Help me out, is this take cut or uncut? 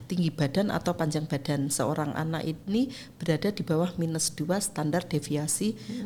uncut